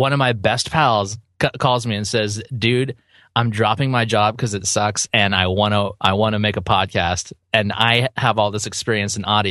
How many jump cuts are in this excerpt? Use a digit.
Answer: 0